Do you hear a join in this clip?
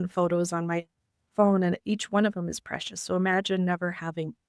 no; 0 cuts

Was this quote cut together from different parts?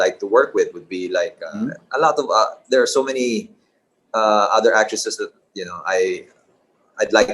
yes; 1 cut; at 1.4 s

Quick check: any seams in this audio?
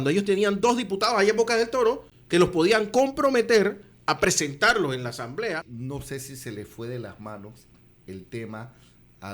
yes; 2 cuts; at 2.1 s, 5.8 s

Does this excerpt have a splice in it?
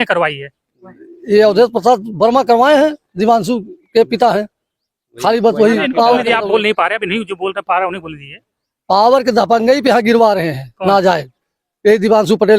no; 0 cuts

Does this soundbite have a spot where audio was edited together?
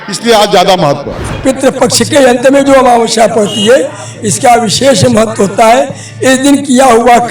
yes; 1 cut; at 1.4 s

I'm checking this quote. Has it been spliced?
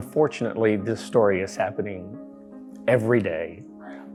no; 0 cuts

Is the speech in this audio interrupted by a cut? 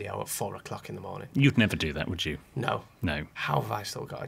yes; 1 cut; at 3.3 s

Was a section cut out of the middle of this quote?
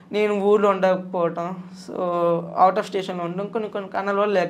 no; 0 cuts

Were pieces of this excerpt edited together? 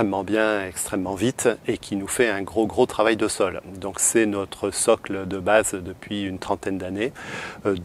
no; 0 cuts

